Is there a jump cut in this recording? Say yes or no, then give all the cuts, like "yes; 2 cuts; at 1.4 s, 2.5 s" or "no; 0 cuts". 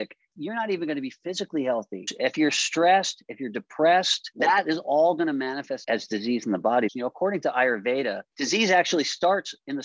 yes; 5 cuts; at 2.1 s, 4.2 s, 5.8 s, 6.9 s, 8.3 s